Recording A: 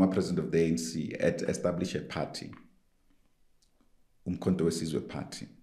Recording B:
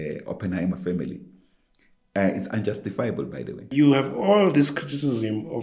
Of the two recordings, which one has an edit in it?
B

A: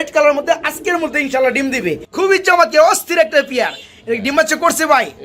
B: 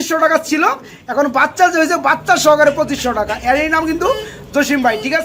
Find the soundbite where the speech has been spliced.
A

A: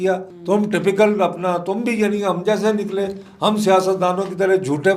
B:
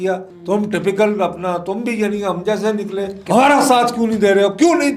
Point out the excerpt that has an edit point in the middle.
B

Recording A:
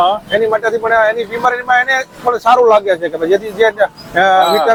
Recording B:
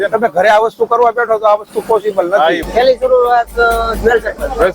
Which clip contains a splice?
B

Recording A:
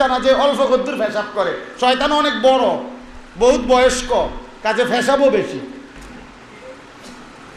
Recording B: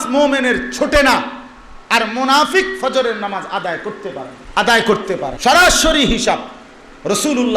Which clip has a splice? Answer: B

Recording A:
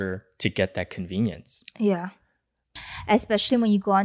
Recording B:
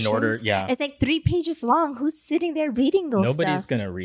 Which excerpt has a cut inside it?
A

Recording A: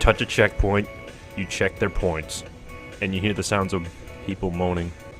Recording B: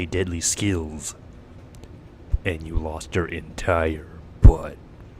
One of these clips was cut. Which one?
B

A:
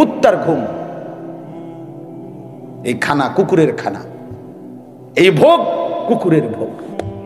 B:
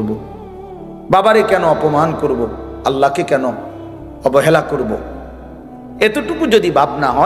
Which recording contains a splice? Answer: A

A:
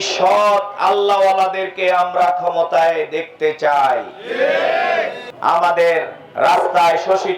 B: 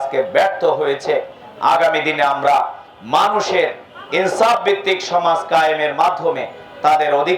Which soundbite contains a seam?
A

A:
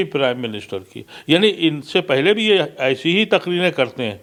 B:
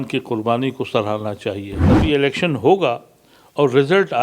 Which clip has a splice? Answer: B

